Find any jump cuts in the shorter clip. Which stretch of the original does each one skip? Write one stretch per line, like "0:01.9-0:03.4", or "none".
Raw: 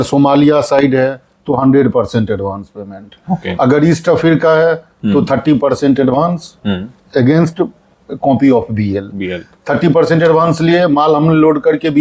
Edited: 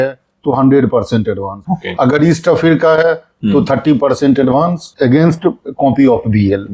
0:02.6-0:03.1
0:06.4-0:07.0
0:07.8-0:08.1